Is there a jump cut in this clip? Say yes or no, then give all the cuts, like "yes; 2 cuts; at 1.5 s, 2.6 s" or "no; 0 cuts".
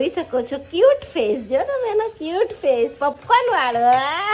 no; 0 cuts